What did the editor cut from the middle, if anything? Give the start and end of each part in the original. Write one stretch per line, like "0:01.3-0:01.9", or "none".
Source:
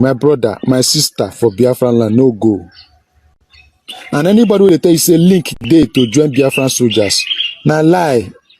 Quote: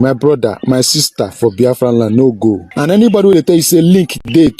0:02.7-0:04.0